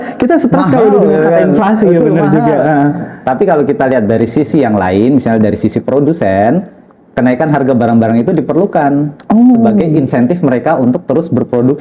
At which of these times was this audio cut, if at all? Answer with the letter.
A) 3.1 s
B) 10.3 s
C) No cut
C